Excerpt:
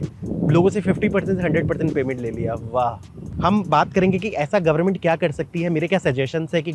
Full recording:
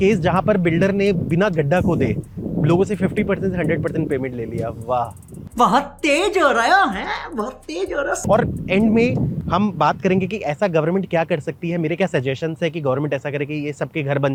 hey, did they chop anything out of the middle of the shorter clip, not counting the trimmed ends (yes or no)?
yes